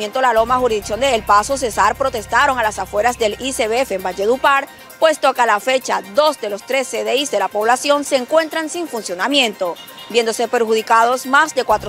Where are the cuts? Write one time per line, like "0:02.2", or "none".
none